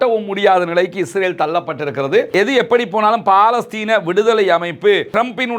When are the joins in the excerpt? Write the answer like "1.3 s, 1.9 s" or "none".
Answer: 2.3 s